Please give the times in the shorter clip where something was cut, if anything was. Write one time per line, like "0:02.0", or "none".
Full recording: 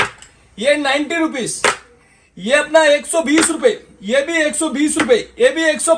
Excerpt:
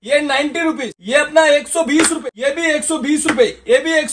0:00.9
0:02.2

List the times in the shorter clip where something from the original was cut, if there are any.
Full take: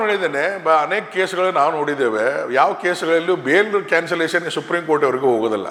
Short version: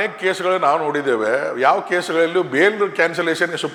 none

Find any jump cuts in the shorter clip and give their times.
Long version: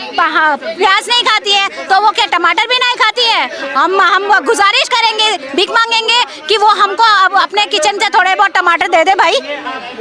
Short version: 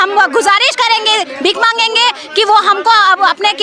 none

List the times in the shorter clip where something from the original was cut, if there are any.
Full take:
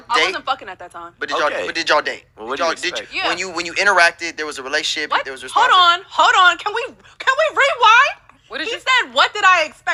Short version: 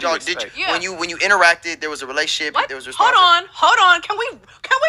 none

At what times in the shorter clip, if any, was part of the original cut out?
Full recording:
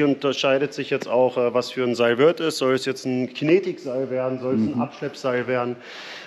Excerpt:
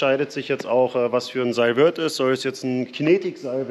none

